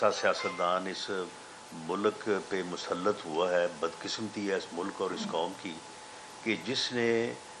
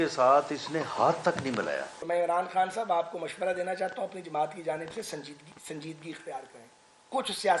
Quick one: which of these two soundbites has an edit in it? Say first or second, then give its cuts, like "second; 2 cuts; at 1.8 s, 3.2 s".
second; 1 cut; at 1.9 s